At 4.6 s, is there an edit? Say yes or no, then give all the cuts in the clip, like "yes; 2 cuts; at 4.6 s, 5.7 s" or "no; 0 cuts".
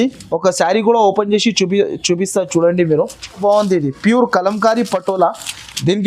no; 1 cut; at 3.4 s